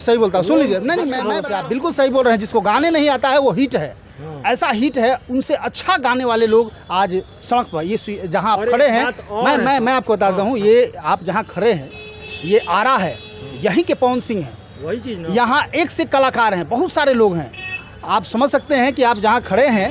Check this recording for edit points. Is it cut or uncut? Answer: cut